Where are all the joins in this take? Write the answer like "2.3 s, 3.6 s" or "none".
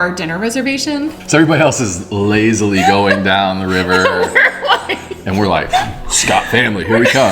1.2 s